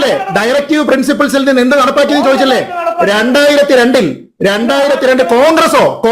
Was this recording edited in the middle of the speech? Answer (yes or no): no